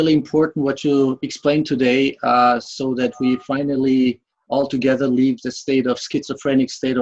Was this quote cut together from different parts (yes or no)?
no